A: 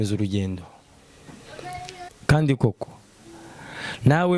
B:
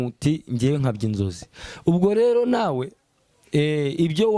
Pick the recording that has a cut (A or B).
A